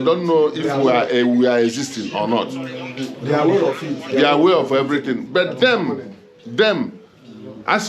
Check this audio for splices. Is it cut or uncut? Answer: uncut